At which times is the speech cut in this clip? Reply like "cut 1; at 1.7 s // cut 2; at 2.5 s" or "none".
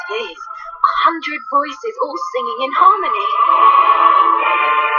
cut 1; at 4.1 s

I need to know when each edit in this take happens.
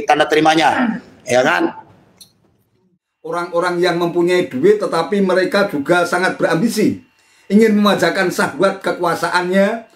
cut 1; at 2.9 s

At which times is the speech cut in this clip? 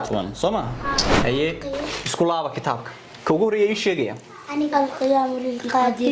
cut 1; at 1.1 s

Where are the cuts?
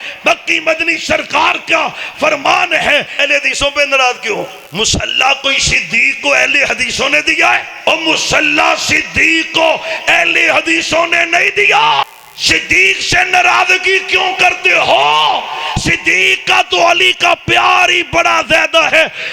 cut 1; at 3.2 s // cut 2; at 4.6 s // cut 3; at 7.7 s // cut 4; at 12.0 s

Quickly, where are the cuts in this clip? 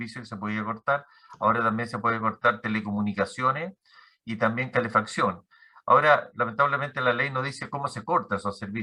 none

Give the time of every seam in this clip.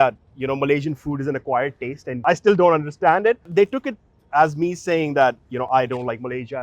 cut 1; at 2.2 s // cut 2; at 3.5 s

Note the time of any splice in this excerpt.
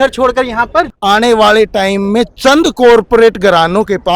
cut 1; at 0.9 s

